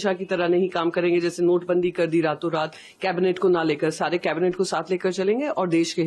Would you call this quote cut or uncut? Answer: uncut